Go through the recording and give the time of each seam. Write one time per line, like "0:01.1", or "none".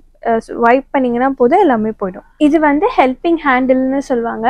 0:02.2